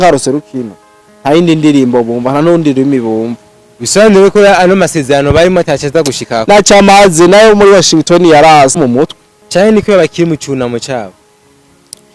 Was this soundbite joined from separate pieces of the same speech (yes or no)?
yes